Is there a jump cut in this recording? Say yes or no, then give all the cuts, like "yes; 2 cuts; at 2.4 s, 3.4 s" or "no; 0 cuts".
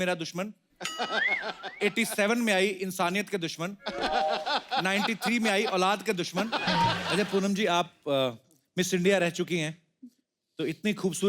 yes; 1 cut; at 7.0 s